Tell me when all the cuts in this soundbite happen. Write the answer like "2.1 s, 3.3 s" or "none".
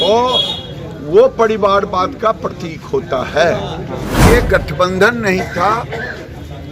4.1 s